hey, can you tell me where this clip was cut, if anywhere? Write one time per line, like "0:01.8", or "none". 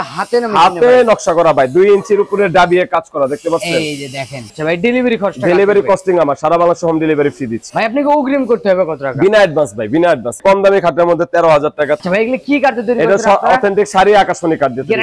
0:04.3
0:07.6
0:10.4
0:12.0

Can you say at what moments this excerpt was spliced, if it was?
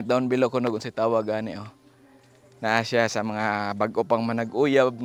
none

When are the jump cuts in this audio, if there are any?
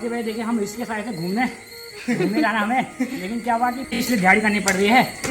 0:04.0

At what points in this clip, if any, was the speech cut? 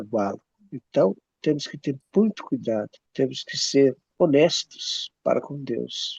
0:03.0
0:04.0

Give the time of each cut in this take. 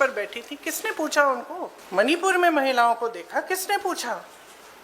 0:01.8

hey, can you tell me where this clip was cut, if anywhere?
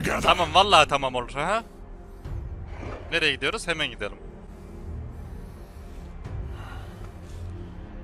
none

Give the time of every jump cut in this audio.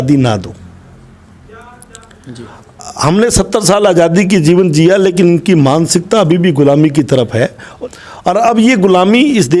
0:07.6

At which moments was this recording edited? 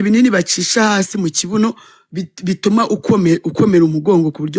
none

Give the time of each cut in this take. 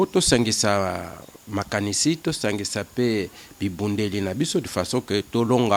none

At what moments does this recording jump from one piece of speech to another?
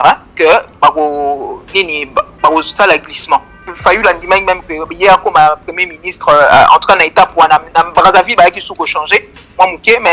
0:03.7

